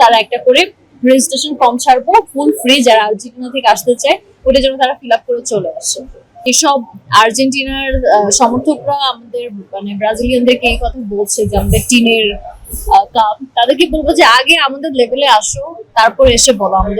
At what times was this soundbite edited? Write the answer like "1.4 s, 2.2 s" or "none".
6.4 s

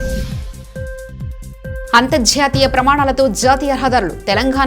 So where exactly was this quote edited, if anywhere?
1.8 s

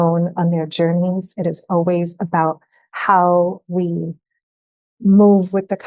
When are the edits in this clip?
none

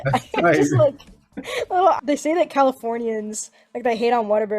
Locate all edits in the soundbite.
2.0 s

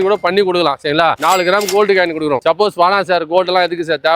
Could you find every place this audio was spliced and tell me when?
1.2 s

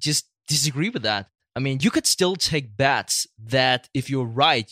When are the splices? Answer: 1.3 s

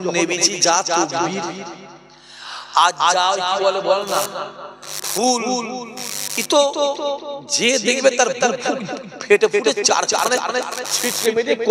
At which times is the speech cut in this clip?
none

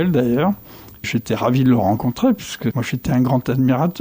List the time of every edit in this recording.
1.1 s, 2.9 s

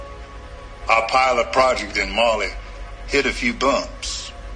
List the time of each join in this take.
none

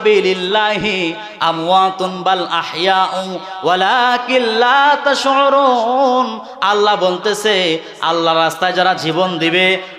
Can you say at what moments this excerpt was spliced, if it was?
none

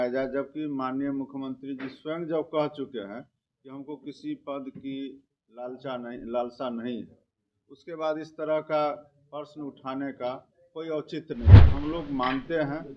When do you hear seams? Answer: 11.7 s

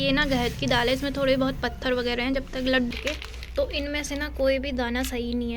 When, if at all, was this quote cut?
2.9 s

